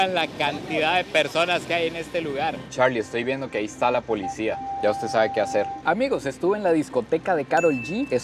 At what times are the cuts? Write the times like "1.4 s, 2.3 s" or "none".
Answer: 2.6 s, 4.7 s, 5.8 s

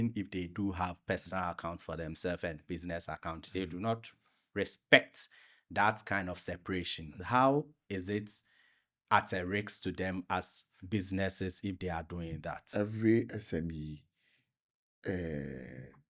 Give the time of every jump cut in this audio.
7.2 s, 12.6 s

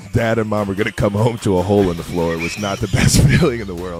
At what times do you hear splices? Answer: none

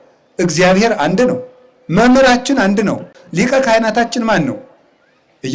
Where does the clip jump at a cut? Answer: 3.1 s

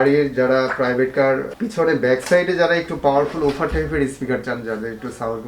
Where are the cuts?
1.5 s

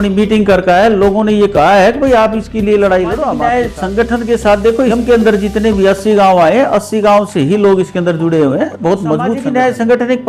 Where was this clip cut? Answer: 3.4 s, 4.9 s, 9.4 s

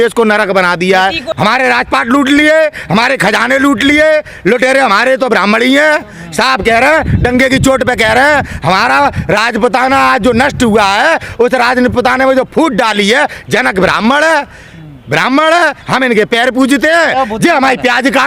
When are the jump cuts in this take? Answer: 1.2 s

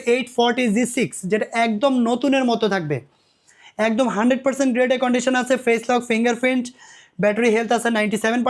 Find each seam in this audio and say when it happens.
none

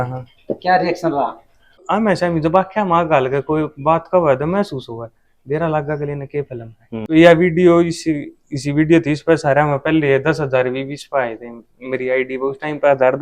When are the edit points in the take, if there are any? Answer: 1.8 s, 7.0 s

